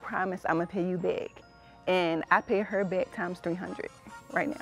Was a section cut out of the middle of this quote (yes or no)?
no